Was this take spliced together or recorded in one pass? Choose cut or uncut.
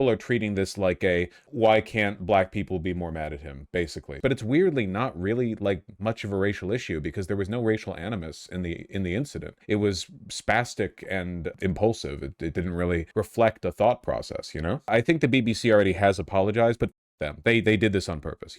cut